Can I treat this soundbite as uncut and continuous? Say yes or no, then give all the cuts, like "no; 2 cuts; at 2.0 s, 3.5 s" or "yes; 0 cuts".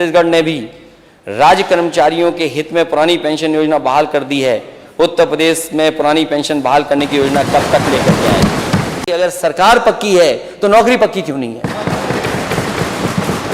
no; 1 cut; at 9.0 s